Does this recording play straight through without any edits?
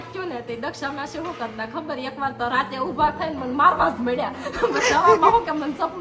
yes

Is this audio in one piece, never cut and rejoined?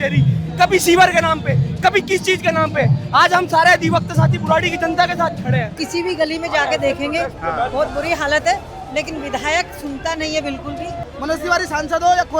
no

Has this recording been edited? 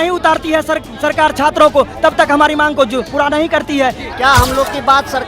yes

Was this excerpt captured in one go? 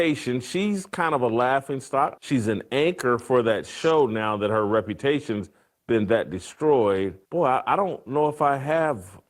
no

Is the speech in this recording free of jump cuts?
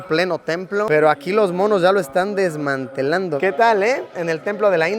no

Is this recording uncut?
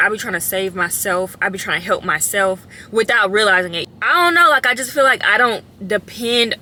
yes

